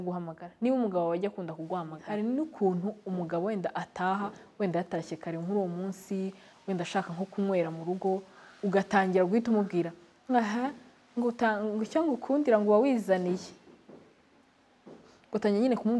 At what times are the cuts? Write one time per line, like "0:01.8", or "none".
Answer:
0:02.0